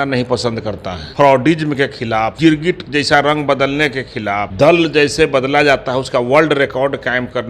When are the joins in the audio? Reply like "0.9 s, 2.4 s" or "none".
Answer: 1.0 s, 2.3 s, 4.5 s